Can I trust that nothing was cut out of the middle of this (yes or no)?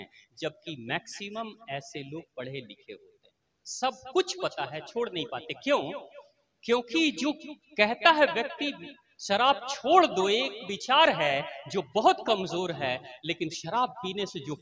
yes